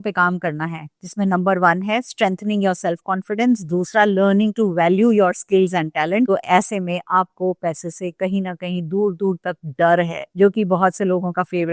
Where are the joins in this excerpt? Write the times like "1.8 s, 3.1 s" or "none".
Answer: 6.3 s, 10.3 s